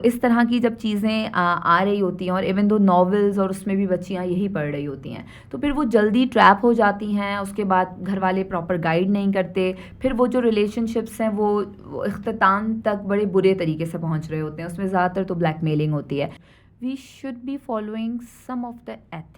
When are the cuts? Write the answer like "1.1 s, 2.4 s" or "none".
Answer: 16.4 s